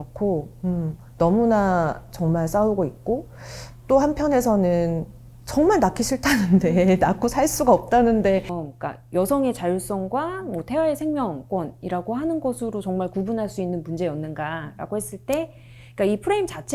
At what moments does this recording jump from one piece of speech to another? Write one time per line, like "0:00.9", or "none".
0:08.6